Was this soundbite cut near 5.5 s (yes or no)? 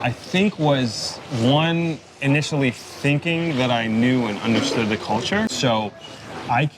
yes